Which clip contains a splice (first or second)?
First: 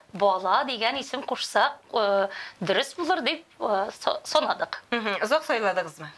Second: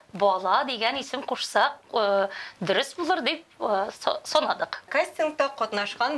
second